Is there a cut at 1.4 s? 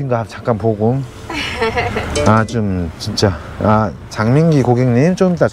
no; 0 cuts

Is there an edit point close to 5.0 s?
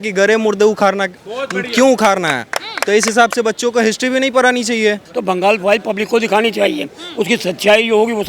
yes; 1 cut; at 5.0 s

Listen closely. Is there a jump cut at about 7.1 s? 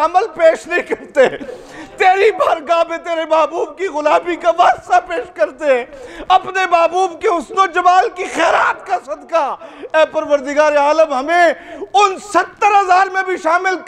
no; 0 cuts

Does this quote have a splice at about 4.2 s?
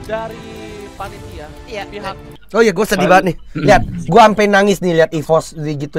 no; 2 cuts; at 1.6 s, 2.3 s

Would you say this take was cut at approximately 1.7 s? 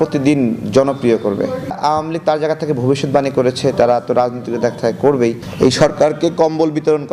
yes; 2 cuts; at 1.7 s, 5.4 s

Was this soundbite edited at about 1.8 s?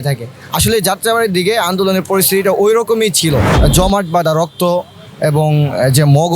no; 1 cut; at 3.5 s

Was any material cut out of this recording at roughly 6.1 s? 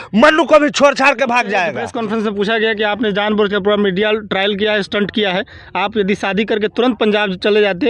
no; 1 cut; at 1.9 s

